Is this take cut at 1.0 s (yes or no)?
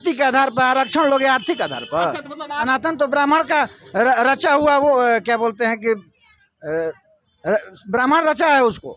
no